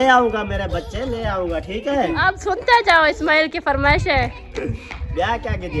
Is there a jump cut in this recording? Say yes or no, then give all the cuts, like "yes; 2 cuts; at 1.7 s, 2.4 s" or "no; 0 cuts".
yes; 1 cut; at 2.3 s